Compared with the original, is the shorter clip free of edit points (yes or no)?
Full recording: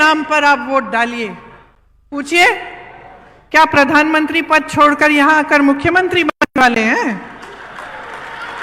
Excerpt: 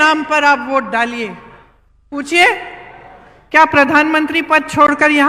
yes